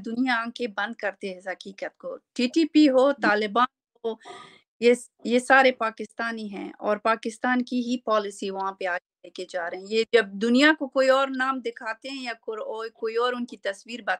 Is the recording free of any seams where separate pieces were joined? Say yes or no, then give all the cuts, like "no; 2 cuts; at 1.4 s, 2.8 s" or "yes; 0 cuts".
yes; 0 cuts